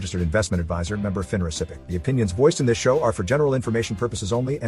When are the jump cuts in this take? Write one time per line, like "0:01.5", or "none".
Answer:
0:01.8

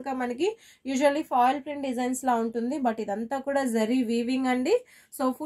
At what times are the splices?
none

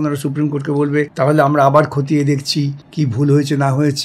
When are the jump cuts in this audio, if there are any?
0:01.1
0:02.8

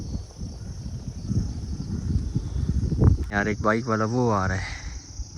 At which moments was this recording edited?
0:03.3

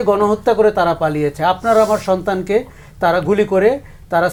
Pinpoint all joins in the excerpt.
none

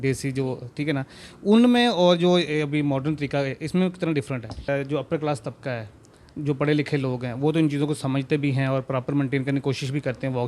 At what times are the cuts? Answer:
0:04.7

